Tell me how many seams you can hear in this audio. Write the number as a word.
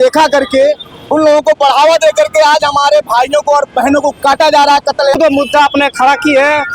one